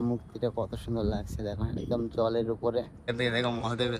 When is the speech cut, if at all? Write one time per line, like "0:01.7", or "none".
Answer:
0:03.1